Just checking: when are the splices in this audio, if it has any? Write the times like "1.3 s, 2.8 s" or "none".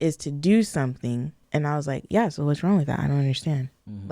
1.4 s